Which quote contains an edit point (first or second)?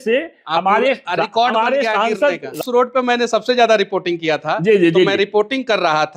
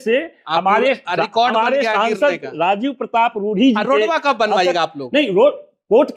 first